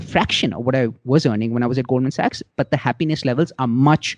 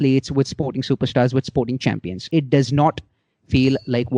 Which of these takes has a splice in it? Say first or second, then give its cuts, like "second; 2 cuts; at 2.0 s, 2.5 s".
second; 1 cut; at 2.2 s